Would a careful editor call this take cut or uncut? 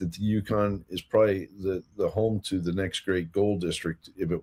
uncut